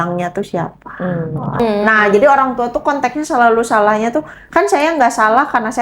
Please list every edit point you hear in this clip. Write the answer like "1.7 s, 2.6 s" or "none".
1.6 s

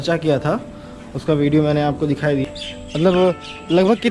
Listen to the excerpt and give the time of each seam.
2.4 s

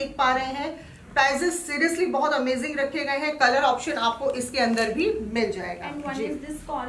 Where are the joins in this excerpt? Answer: none

